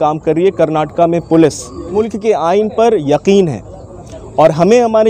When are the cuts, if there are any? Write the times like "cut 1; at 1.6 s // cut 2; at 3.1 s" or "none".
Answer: cut 1; at 2.0 s